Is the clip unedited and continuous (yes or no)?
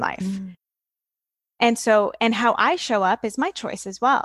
yes